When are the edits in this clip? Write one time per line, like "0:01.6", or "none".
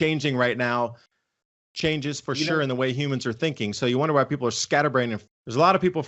0:01.1
0:05.2